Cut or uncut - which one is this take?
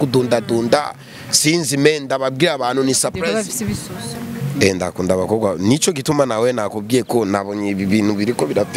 uncut